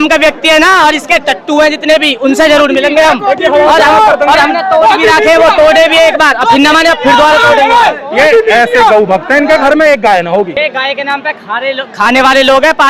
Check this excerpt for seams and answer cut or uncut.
cut